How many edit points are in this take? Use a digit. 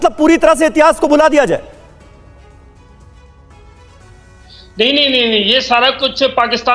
0